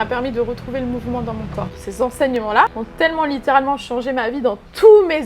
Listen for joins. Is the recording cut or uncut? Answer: cut